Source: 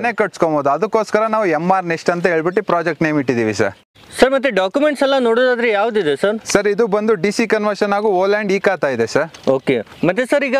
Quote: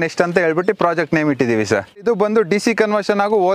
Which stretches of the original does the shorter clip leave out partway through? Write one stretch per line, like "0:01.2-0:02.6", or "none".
0:03.9-0:06.7